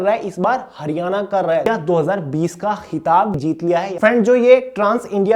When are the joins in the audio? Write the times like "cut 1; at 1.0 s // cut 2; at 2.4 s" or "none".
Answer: cut 1; at 1.7 s // cut 2; at 3.5 s